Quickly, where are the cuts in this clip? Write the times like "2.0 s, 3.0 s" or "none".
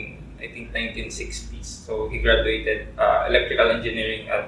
none